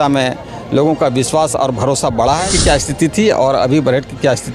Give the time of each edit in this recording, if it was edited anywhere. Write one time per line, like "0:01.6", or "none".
0:02.5